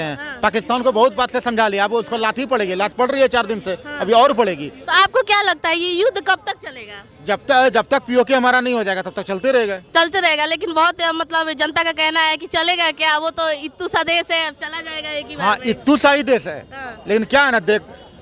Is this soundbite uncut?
yes; 0 cuts

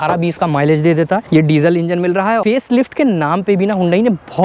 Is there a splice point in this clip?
yes; 2 cuts; at 1.2 s, 2.4 s

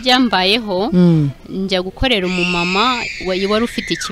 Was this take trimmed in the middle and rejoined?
no; 0 cuts

